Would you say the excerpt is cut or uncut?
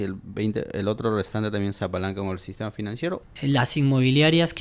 cut